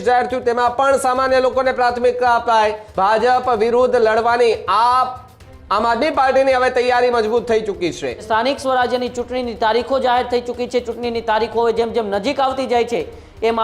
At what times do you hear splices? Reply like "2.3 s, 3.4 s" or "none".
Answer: 2.8 s, 8.2 s